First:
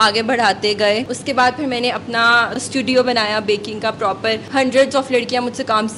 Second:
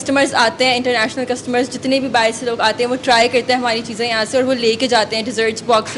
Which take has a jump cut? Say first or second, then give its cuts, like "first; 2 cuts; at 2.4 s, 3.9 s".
first; 3 cuts; at 1.1 s, 2.6 s, 4.4 s